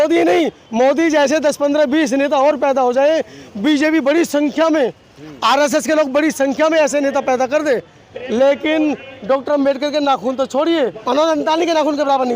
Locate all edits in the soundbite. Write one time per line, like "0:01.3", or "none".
0:11.0